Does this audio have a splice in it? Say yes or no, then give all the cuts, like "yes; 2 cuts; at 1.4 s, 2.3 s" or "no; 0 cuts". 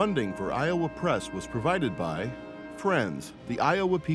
no; 0 cuts